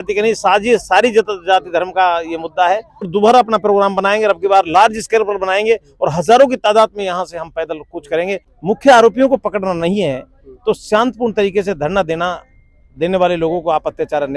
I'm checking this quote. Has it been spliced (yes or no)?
yes